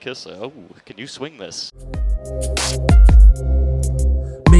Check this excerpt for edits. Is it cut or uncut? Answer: cut